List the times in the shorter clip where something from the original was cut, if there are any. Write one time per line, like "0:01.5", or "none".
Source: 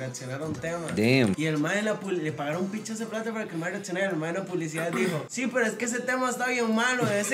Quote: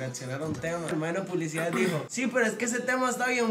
0:00.9